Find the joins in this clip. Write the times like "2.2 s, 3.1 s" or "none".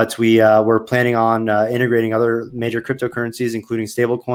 none

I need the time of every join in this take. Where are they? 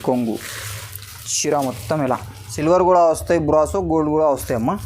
2.4 s

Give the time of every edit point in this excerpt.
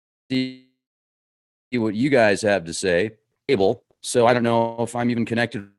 none

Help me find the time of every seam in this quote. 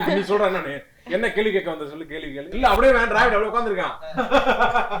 2.5 s

